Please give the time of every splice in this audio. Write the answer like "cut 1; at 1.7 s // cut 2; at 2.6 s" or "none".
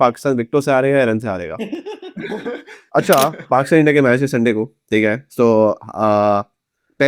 cut 1; at 2.7 s

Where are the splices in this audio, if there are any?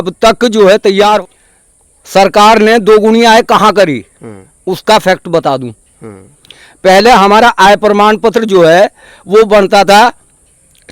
cut 1; at 1.2 s

